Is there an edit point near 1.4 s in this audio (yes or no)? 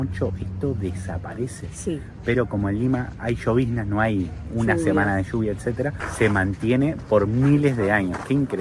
no